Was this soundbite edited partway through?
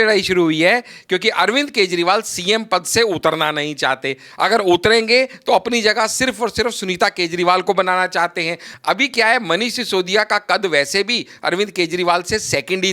yes; 1 cut; at 8.7 s

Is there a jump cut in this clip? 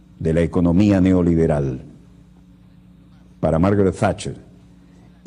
yes; 1 cut; at 1.5 s

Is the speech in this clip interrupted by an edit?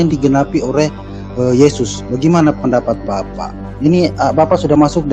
no; 0 cuts

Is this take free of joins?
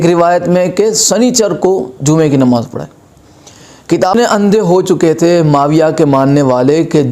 no; 1 cut; at 4.1 s

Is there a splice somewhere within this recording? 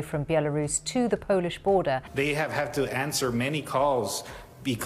yes; 1 cut; at 2.1 s

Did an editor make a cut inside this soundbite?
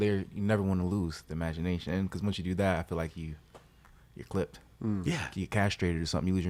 no; 0 cuts

